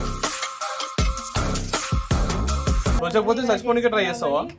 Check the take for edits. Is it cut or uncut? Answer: cut